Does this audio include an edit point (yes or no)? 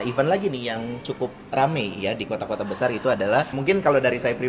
yes